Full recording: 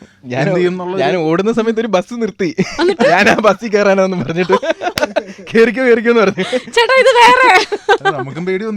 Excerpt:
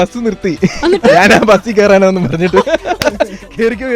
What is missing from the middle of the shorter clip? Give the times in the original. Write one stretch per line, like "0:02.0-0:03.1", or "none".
none